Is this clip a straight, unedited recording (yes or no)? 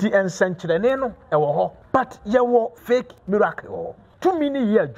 no